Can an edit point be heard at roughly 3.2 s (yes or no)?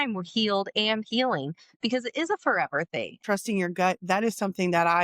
yes